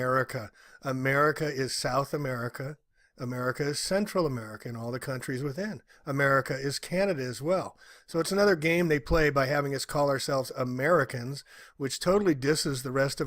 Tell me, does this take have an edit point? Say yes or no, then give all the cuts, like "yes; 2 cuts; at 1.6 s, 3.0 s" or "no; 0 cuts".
yes; 1 cut; at 4.1 s